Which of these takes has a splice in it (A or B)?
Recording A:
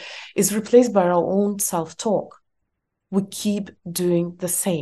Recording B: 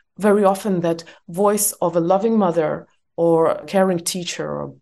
B